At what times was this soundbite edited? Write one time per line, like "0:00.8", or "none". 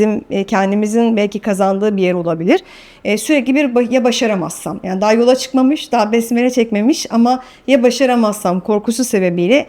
none